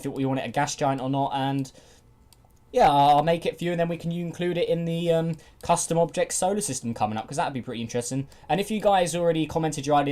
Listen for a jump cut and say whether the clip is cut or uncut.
cut